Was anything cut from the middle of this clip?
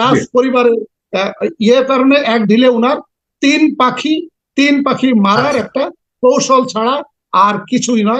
no; 0 cuts

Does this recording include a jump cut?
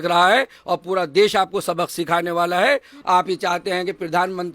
yes; 1 cut; at 2.9 s

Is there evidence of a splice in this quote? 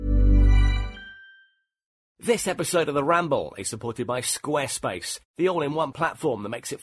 yes; 1 cut; at 2.1 s

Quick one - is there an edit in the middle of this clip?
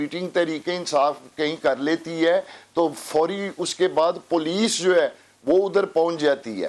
no; 0 cuts

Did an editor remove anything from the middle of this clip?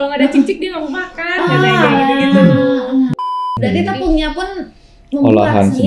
yes; 1 cut; at 3.1 s

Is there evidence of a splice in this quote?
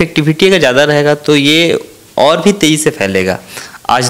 no; 0 cuts

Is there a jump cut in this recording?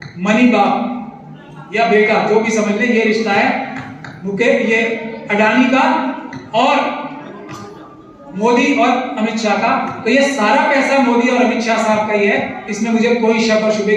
no; 0 cuts

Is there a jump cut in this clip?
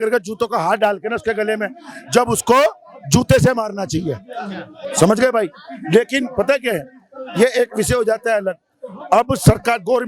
no; 0 cuts

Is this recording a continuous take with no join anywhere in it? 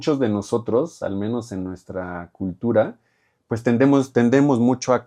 yes; 0 cuts

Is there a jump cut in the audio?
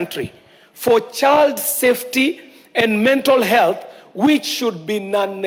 no; 0 cuts

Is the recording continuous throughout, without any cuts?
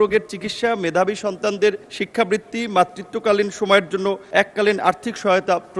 no; 2 cuts; at 1.9 s, 4.2 s

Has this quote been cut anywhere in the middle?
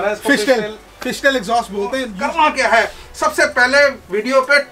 yes; 1 cut; at 2.1 s

